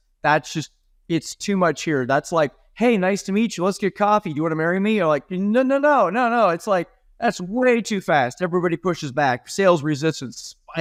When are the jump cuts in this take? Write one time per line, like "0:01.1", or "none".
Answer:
none